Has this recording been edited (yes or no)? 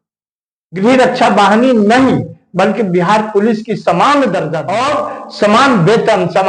yes